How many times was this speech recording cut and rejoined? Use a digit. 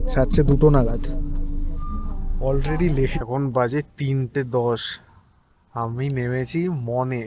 1